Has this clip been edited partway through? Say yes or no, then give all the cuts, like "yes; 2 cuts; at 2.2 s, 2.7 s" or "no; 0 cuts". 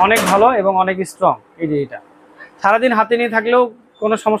no; 0 cuts